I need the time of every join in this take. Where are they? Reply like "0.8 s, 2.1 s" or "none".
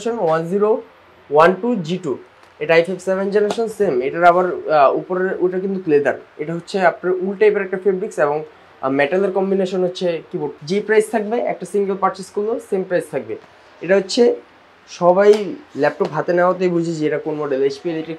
10.5 s